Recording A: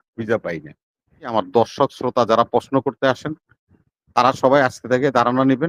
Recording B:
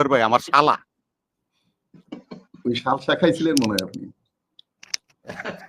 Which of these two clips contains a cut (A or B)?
A